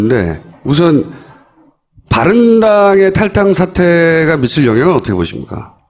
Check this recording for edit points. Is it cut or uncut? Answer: uncut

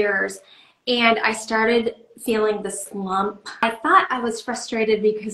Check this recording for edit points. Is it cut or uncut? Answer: cut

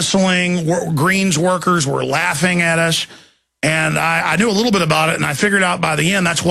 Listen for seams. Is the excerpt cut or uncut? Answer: cut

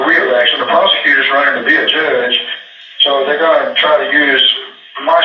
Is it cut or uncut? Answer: uncut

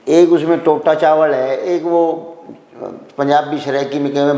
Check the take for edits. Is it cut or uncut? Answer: uncut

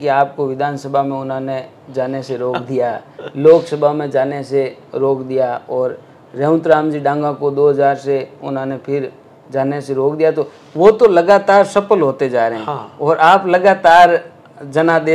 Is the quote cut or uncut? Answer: uncut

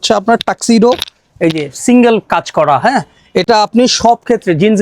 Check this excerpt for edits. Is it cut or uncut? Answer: uncut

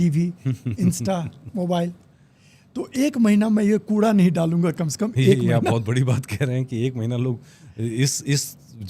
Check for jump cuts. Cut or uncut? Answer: uncut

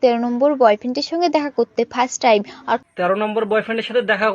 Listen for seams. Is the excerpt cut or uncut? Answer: cut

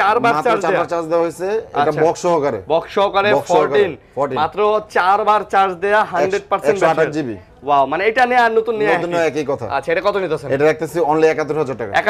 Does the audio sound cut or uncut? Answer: uncut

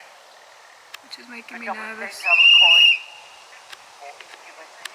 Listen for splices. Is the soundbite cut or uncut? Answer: uncut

